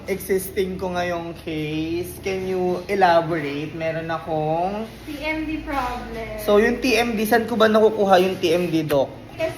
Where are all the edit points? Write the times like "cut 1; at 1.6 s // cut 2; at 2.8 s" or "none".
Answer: none